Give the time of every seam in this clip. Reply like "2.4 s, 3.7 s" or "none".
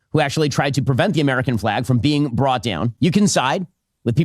2.9 s